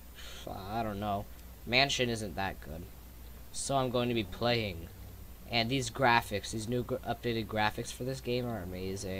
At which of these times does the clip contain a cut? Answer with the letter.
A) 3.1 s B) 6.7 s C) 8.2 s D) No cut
C